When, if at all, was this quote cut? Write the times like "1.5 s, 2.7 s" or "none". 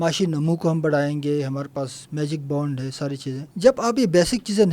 3.5 s